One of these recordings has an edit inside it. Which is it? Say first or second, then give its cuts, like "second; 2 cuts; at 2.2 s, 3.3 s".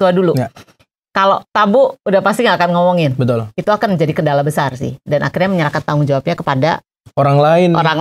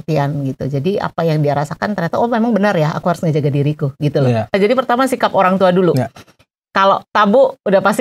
second; 1 cut; at 4.5 s